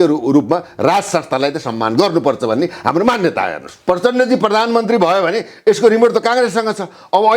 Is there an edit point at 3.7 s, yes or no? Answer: yes